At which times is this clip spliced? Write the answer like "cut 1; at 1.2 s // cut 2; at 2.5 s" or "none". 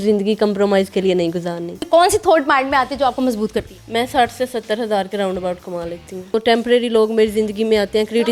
cut 1; at 1.8 s // cut 2; at 3.8 s // cut 3; at 6.4 s